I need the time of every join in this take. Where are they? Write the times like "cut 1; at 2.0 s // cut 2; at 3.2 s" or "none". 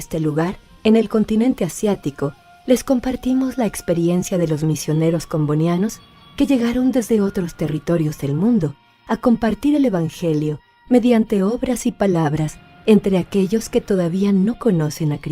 cut 1; at 5.7 s